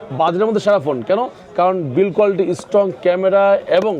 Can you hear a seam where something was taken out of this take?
no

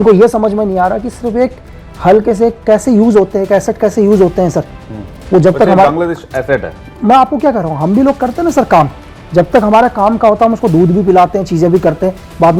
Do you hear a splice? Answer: no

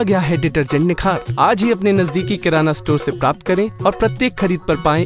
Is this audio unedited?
yes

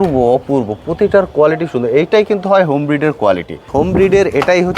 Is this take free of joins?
no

